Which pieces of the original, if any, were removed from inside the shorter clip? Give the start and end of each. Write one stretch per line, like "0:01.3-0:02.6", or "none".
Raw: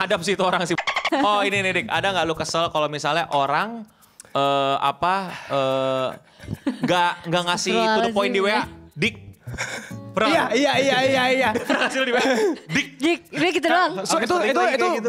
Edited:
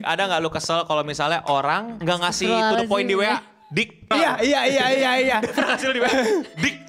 0:03.8-0:07.2
0:09.4-0:10.2